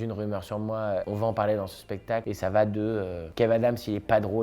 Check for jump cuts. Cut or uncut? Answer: cut